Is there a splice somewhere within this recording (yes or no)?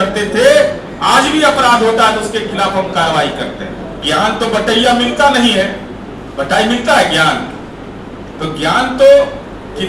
yes